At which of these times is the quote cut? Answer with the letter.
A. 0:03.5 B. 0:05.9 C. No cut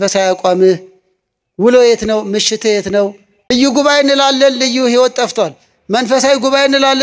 A